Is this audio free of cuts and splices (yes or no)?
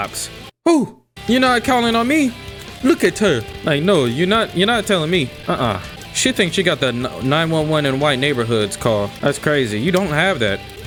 yes